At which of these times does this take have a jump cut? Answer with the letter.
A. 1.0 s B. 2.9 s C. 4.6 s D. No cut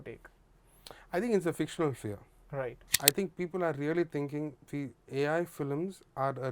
B